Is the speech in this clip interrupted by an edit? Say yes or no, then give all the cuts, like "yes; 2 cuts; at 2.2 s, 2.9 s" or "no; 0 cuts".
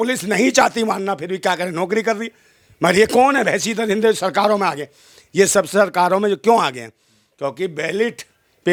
no; 0 cuts